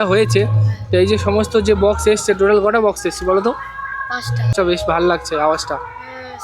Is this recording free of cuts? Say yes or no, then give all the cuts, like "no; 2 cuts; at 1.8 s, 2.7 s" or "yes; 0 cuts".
no; 1 cut; at 4.5 s